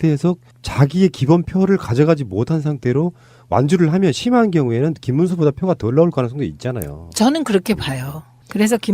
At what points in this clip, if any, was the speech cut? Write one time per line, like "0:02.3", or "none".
0:02.6